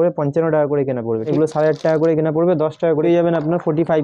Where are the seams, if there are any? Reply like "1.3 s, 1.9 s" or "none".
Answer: 1.3 s, 3.0 s

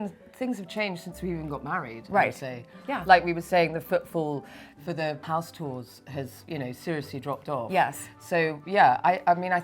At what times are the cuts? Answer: 5.2 s

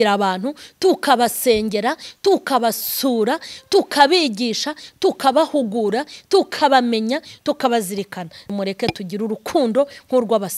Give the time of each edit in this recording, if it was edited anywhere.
8.5 s

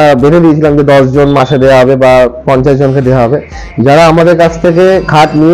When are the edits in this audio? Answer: none

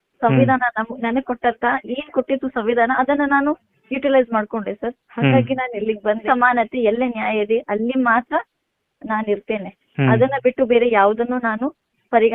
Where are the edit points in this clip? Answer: 6.2 s

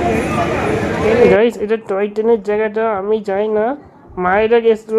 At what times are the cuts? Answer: 1.3 s

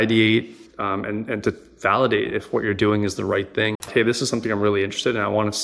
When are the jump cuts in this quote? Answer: 3.9 s

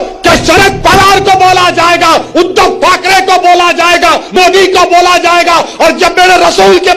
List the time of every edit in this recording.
4.3 s

